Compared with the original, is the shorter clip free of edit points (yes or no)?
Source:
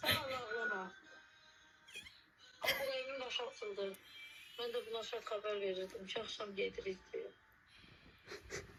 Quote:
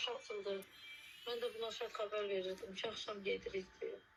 yes